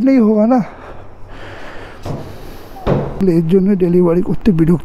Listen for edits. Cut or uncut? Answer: cut